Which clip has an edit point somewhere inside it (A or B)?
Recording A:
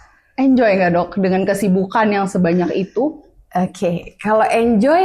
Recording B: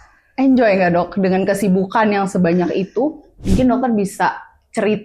B